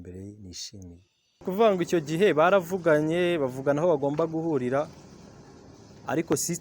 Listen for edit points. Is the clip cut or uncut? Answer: cut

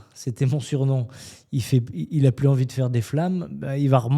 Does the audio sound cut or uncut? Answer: uncut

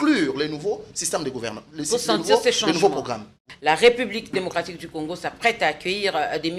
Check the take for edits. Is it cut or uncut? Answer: cut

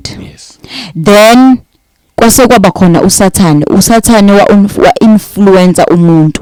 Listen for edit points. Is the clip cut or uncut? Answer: uncut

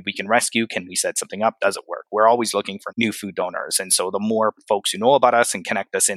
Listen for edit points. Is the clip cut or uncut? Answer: uncut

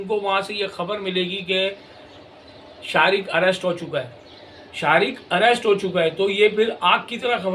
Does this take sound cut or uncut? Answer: uncut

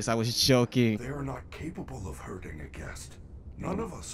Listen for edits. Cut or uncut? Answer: cut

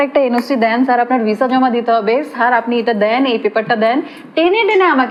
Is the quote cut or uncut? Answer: uncut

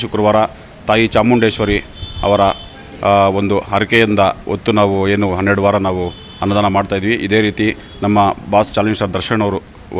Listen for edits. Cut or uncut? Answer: uncut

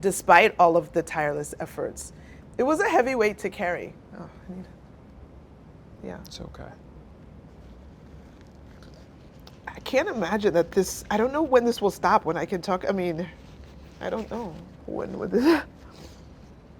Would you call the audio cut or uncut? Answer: cut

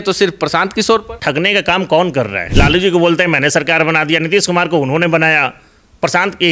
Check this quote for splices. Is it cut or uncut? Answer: cut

